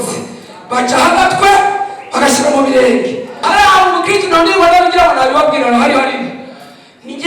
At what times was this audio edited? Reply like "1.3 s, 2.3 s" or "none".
3.4 s